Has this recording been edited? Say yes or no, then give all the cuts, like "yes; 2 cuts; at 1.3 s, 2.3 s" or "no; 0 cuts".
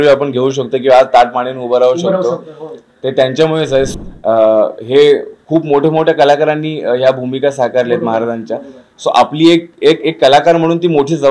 yes; 1 cut; at 3.9 s